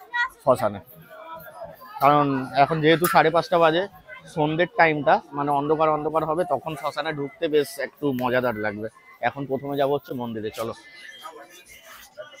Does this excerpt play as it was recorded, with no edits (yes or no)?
yes